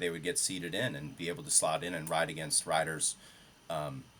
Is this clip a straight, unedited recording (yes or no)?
yes